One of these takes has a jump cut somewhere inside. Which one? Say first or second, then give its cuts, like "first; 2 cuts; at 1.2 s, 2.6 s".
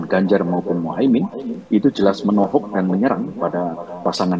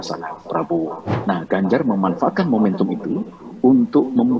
second; 1 cut; at 1.1 s